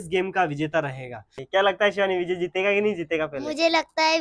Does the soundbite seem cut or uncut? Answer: cut